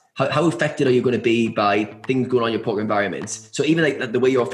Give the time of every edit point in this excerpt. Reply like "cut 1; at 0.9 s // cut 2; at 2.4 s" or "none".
none